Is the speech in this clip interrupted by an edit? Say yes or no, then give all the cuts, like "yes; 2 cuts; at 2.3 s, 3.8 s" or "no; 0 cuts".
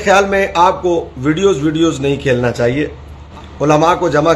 yes; 1 cut; at 3.2 s